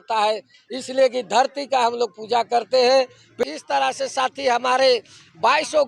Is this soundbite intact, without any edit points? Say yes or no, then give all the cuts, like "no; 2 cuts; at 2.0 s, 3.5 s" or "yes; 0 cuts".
no; 1 cut; at 3.4 s